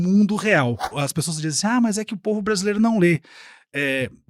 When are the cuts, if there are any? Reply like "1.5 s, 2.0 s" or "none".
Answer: 0.9 s